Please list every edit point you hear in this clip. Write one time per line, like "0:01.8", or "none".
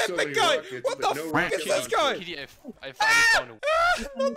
none